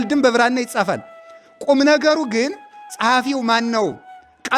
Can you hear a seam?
no; 0 cuts

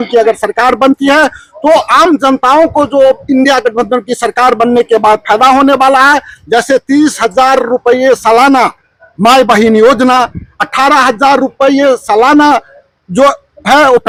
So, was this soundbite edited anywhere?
no; 0 cuts

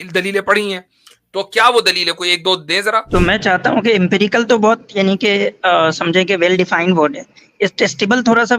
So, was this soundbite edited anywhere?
yes; 1 cut; at 3.1 s

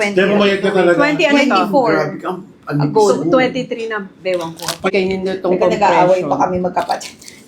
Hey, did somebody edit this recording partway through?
yes; 1 cut; at 4.9 s

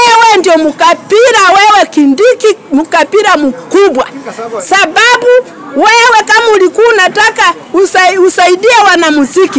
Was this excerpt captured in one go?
yes; 0 cuts

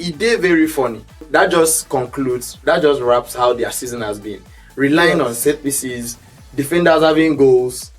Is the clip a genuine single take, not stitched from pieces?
no; 1 cut; at 1.3 s

